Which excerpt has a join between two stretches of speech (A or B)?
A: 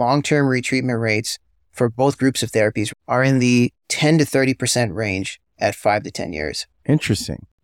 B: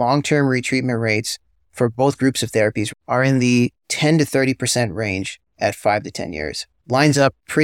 B